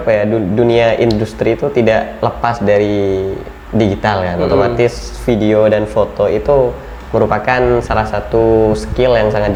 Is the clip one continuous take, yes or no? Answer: yes